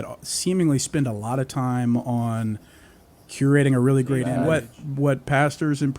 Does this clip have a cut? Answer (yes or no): yes